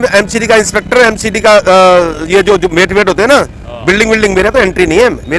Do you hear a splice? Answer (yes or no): no